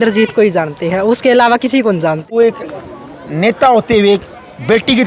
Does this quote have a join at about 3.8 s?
no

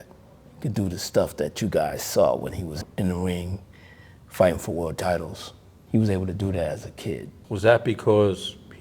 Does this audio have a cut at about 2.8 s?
yes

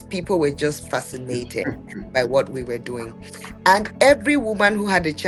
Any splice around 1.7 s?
no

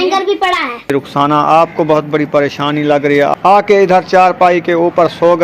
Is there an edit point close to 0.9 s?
yes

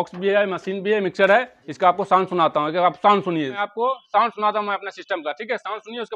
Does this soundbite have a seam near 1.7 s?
no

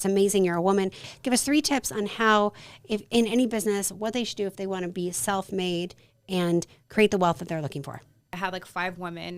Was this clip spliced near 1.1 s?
yes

